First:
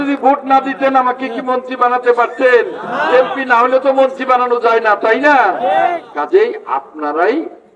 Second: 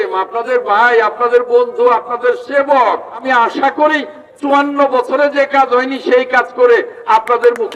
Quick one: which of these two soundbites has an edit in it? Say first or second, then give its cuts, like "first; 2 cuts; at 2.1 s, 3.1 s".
second; 1 cut; at 3.2 s